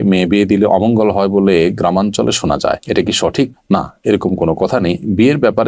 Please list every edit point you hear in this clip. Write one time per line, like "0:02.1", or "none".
none